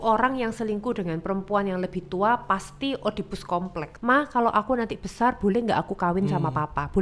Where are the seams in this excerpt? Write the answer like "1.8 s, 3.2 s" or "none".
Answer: 3.9 s

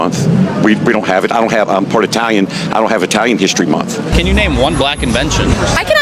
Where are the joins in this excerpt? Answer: 4.0 s

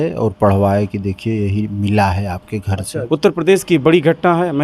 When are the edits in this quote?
2.9 s

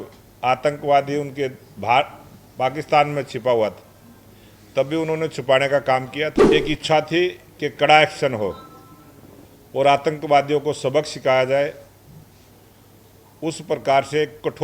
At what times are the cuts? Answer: 6.4 s

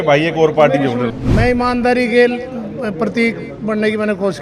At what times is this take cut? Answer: 1.1 s

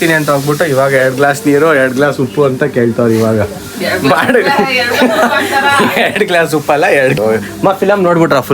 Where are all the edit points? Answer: 7.2 s

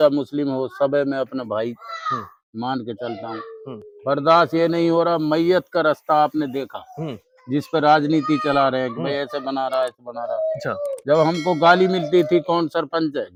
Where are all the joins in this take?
none

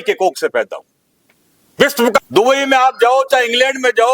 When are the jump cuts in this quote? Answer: 2.2 s

